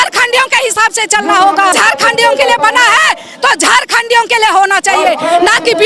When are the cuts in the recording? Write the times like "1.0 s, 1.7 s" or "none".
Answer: 1.7 s